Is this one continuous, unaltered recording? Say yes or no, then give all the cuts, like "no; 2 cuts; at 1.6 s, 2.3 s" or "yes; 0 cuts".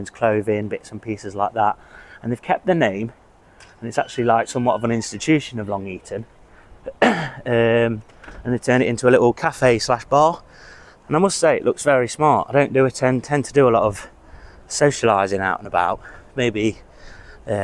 yes; 0 cuts